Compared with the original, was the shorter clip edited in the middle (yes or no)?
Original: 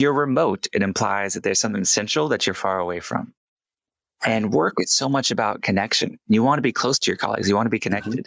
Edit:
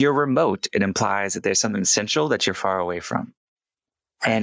no